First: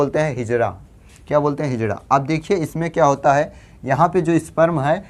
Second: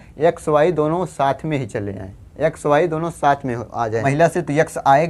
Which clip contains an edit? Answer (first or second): second